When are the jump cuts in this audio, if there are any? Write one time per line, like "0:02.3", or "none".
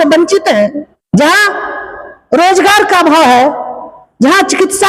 0:00.9